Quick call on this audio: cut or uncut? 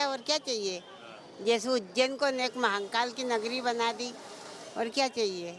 uncut